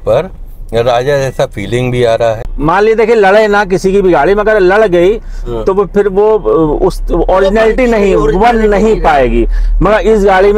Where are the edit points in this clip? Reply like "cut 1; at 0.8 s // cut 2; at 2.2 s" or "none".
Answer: cut 1; at 2.5 s